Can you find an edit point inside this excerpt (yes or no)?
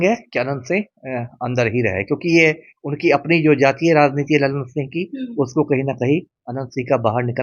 no